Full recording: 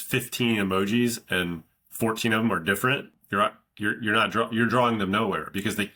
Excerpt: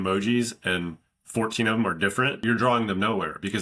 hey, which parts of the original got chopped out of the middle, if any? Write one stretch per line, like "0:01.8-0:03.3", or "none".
0:03.0-0:04.5